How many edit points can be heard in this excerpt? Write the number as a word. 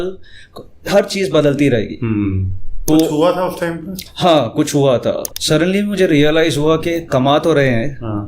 two